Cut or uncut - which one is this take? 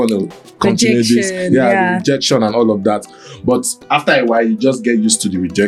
uncut